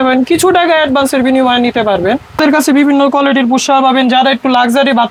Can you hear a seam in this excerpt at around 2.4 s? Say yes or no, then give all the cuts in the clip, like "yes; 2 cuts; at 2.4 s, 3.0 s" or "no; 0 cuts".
no; 0 cuts